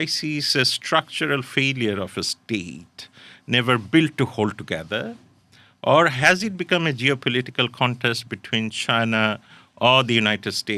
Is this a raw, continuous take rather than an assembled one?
yes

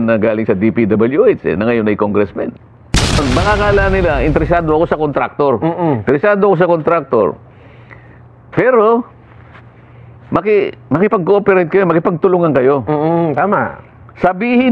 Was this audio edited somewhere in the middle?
yes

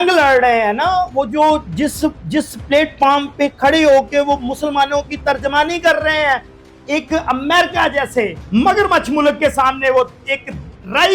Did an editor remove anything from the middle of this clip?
yes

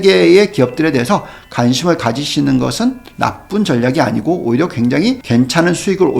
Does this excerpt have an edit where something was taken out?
yes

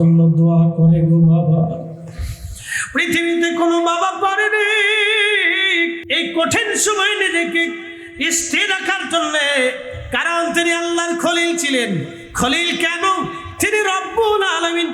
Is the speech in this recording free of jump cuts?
no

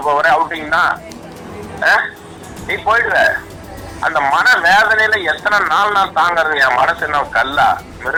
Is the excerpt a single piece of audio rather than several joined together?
yes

